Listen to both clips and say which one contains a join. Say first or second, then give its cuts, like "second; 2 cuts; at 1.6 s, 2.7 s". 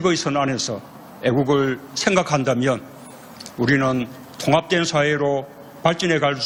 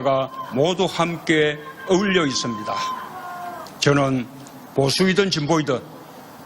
second; 1 cut; at 3.7 s